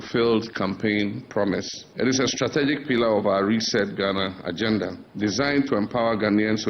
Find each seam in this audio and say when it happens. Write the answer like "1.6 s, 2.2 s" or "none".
1.8 s, 5.0 s